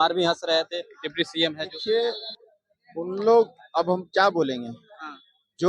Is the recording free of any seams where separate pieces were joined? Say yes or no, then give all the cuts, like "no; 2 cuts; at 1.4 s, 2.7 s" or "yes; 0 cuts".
no; 1 cut; at 1.8 s